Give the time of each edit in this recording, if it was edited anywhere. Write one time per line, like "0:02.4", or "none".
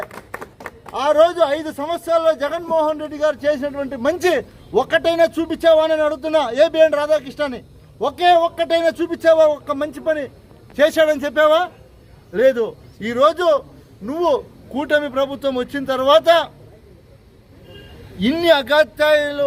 none